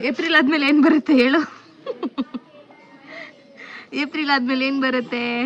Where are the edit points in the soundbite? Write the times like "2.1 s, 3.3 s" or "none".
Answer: none